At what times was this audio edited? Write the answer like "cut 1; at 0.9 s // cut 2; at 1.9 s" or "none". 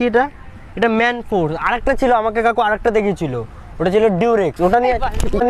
none